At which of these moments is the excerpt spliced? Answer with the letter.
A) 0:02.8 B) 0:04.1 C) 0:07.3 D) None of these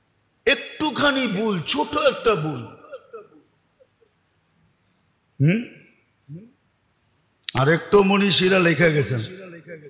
D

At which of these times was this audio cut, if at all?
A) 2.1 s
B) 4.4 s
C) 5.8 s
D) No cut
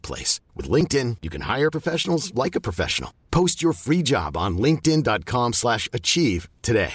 D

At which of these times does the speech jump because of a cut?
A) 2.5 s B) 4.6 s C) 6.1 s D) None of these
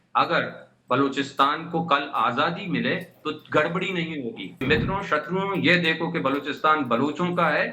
B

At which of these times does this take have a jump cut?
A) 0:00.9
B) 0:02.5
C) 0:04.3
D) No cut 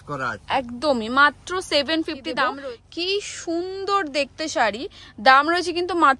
B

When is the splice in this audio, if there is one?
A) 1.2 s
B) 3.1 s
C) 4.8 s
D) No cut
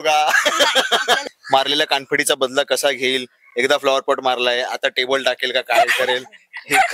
A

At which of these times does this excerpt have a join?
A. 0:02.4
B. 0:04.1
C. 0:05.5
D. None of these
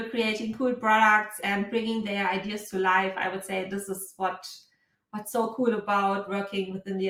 D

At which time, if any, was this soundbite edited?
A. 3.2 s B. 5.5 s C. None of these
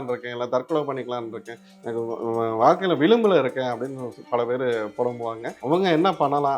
B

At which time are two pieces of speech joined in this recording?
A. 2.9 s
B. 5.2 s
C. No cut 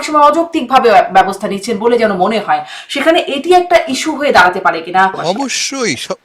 B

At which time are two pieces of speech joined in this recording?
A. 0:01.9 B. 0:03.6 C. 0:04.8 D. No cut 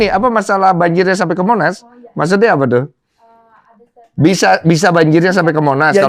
D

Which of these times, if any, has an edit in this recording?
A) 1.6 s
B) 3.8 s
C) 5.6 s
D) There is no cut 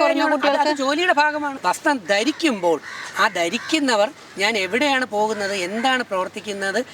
A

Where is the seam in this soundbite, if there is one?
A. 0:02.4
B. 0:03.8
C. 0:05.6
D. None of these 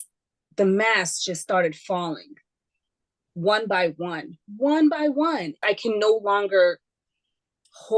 C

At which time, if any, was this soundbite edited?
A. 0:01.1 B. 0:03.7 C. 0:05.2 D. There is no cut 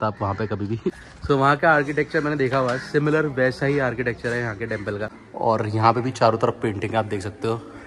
C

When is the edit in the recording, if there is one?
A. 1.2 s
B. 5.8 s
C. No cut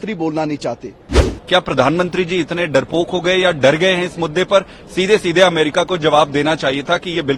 A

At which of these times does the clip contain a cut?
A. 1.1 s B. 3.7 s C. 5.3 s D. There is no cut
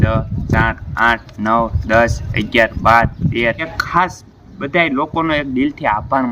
B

